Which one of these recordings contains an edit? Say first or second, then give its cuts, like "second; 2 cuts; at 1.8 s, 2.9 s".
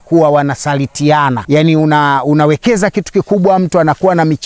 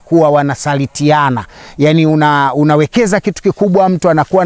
first; 1 cut; at 1.4 s